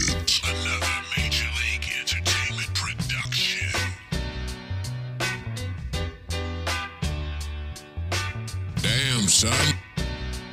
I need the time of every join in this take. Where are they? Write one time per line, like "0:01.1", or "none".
none